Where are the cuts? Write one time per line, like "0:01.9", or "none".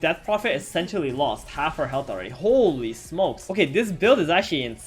0:03.4